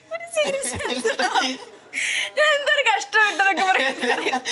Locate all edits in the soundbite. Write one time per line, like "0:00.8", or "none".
none